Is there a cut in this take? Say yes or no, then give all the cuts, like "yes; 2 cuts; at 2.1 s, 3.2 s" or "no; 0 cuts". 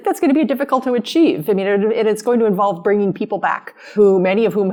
no; 0 cuts